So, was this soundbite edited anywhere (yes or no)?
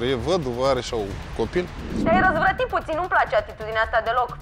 yes